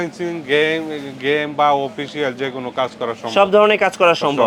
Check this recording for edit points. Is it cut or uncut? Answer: uncut